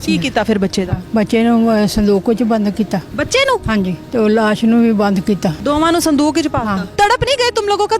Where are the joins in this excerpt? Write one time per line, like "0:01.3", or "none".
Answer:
0:01.0
0:03.7
0:05.5
0:06.9